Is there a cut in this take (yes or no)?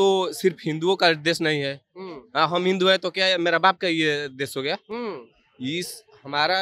no